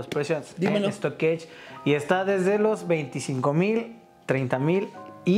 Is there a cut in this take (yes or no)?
no